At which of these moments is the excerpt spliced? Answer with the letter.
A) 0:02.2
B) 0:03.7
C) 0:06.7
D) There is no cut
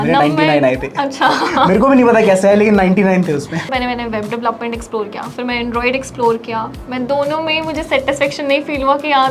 B